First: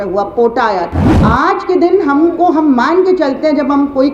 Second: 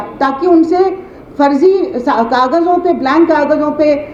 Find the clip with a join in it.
first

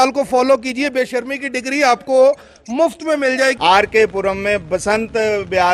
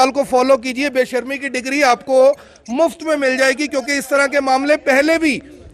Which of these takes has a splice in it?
first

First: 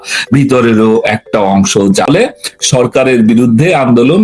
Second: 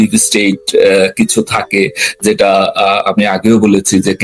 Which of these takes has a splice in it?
first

